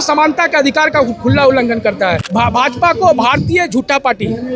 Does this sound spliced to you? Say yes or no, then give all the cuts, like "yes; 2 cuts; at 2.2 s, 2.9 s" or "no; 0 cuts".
yes; 1 cut; at 2.2 s